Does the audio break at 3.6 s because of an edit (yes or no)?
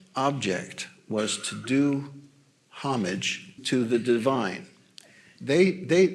yes